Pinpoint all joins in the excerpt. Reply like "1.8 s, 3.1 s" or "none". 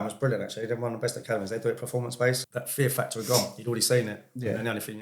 2.4 s